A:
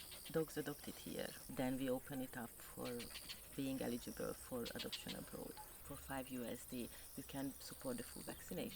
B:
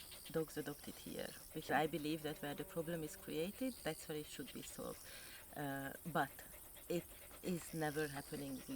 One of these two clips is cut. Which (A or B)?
A